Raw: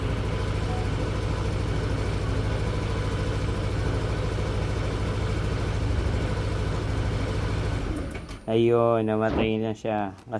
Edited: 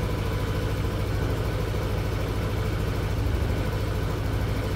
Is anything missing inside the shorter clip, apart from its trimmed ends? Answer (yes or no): no